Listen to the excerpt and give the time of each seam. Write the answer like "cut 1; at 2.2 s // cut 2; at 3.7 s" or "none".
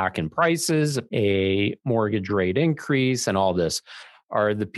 cut 1; at 1.0 s